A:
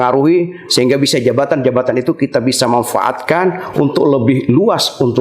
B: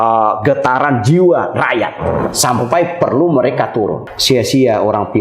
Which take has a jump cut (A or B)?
B